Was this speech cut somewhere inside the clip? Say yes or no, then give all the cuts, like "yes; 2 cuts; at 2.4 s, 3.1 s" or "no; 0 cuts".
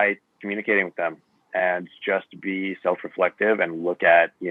no; 0 cuts